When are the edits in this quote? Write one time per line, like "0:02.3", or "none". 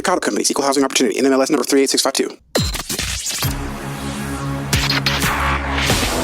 0:02.4